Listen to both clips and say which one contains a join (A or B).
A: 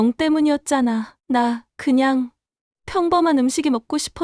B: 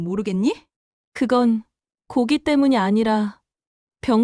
B